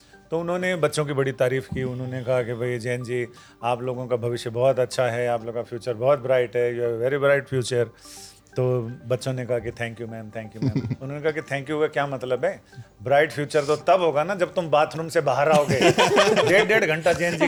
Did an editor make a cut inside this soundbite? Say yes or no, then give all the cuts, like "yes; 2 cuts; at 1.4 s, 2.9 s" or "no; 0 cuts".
no; 0 cuts